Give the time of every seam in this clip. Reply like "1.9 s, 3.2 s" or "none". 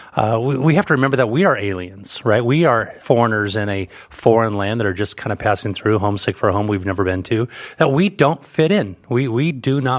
2.9 s